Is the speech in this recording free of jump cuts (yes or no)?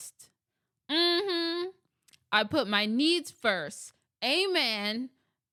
yes